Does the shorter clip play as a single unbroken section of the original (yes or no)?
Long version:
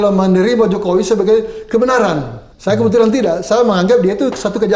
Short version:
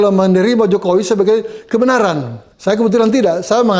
yes